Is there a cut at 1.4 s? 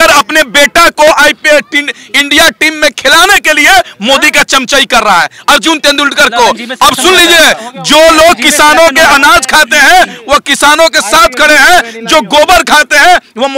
no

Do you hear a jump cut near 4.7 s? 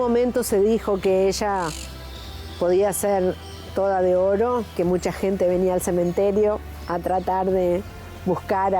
yes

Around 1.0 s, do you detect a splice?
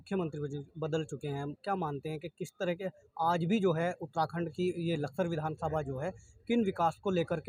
no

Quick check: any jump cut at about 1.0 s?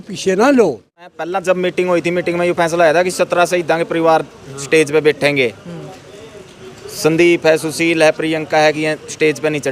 yes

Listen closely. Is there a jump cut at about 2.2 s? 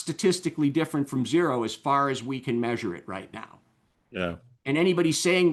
no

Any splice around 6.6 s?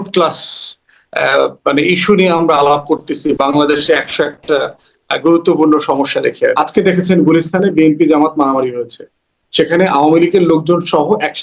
yes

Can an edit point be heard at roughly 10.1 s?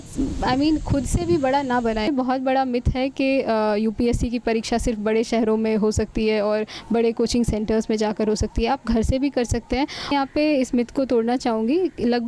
yes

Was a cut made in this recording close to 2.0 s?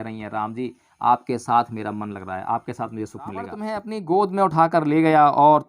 no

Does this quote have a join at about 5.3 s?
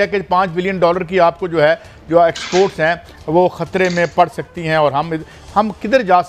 no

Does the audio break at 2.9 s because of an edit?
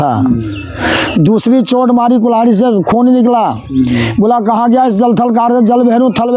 no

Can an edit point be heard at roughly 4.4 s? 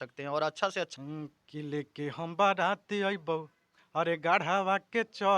no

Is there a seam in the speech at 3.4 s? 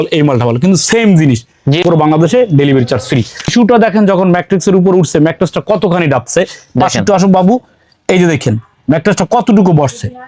yes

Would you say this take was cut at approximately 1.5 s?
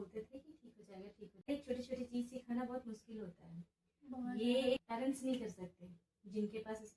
yes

